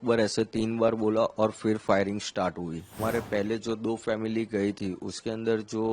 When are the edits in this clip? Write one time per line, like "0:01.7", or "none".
0:03.0

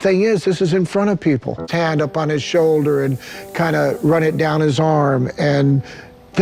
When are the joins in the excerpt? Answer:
none

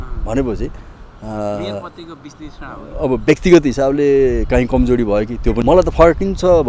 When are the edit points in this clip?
0:05.6

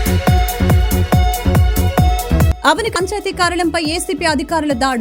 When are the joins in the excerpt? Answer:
0:02.5

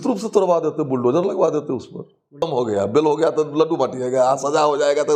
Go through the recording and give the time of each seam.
0:02.4

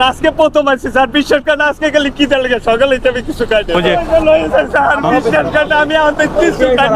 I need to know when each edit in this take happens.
0:03.7

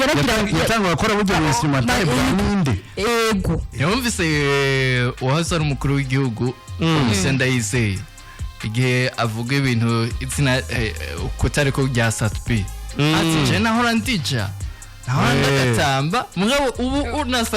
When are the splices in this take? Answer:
0:03.7

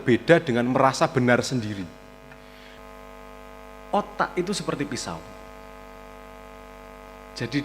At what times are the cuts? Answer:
0:02.8

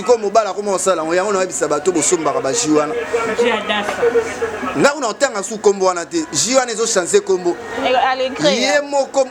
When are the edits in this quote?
none

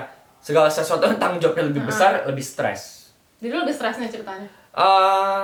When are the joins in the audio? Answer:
none

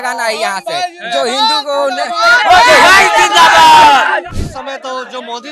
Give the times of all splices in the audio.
0:04.3

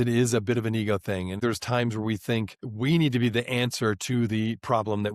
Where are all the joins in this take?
0:01.4

